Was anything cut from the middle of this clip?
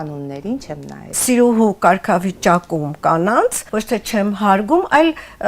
yes; 2 cuts; at 1.2 s, 3.6 s

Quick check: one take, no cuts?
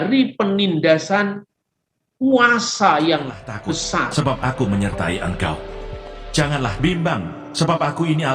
no; 1 cut; at 4.1 s

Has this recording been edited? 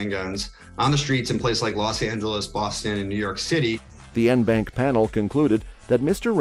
no; 0 cuts

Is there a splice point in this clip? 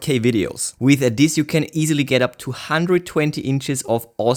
no; 0 cuts

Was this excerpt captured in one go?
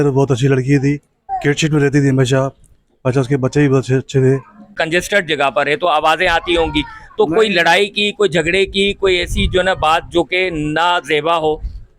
no; 2 cuts; at 1.2 s, 4.8 s

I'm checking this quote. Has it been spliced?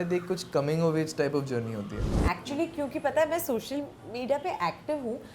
yes; 1 cut; at 2.2 s

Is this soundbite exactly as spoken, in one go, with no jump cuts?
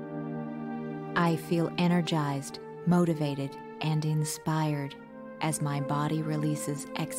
no; 1 cut; at 1.1 s

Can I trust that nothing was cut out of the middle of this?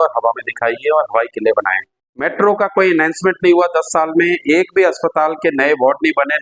no; 1 cut; at 2.2 s

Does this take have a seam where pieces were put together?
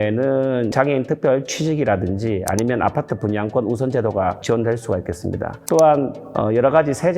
no; 0 cuts

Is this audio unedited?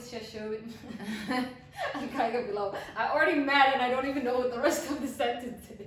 yes; 0 cuts

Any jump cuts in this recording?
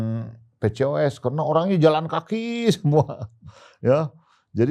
no; 0 cuts

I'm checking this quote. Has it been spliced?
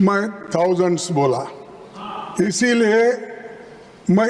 no; 0 cuts

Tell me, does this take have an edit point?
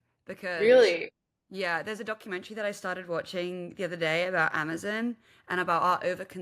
no; 0 cuts

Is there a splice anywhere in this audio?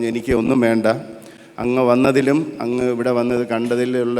no; 0 cuts

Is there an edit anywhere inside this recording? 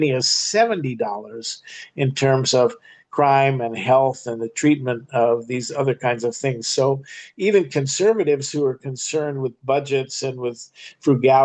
no; 0 cuts

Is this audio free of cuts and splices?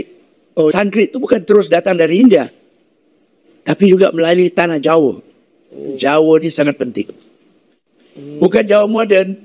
no; 1 cut; at 5.9 s

